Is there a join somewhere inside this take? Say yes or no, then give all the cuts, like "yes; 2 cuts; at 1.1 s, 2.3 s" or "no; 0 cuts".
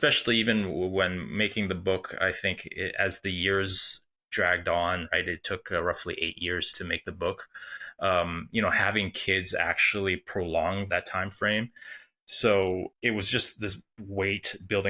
yes; 3 cuts; at 6.7 s, 10.9 s, 12.9 s